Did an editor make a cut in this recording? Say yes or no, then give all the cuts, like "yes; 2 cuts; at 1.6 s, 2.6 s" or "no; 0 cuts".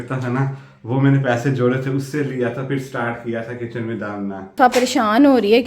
yes; 1 cut; at 4.6 s